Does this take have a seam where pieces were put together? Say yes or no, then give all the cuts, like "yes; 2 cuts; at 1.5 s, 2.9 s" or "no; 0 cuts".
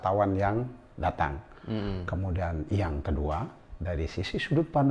no; 0 cuts